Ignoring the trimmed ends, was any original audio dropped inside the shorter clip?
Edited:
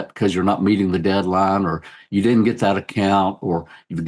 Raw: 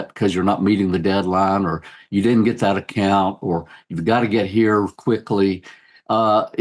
no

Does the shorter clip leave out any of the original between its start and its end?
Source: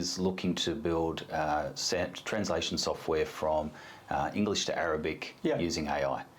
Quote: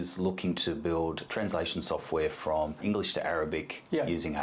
yes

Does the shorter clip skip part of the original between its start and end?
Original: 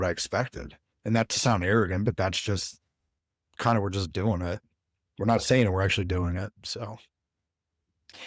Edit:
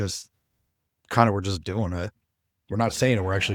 no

